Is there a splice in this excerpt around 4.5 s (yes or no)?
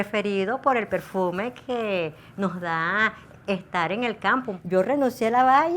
yes